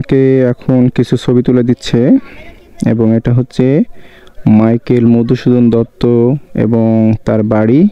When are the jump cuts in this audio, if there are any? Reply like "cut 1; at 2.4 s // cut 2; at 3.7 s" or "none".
none